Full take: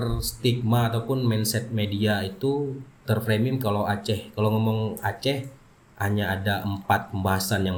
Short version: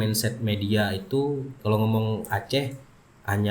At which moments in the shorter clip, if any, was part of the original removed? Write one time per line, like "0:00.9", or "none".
0:01.5